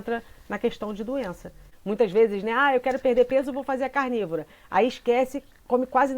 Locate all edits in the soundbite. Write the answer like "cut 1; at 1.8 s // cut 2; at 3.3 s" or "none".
cut 1; at 1.7 s